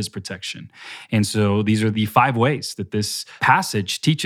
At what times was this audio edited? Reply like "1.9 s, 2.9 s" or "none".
1.9 s, 3.4 s